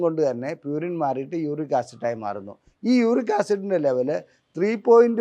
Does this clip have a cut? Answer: no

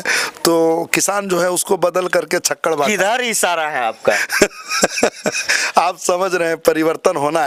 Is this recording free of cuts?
yes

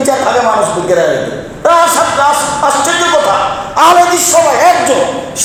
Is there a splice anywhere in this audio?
no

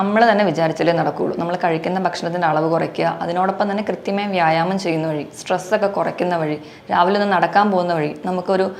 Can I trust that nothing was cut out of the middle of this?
yes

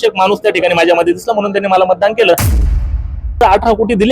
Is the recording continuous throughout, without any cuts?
no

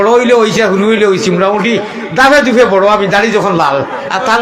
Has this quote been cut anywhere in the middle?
no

